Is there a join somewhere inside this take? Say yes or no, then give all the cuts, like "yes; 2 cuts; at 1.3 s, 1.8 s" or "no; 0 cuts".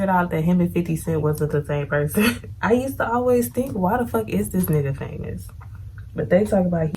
yes; 1 cut; at 2.5 s